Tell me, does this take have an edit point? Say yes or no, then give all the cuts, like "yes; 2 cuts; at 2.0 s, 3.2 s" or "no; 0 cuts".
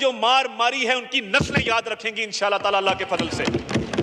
no; 0 cuts